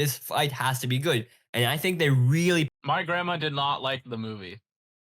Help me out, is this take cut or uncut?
cut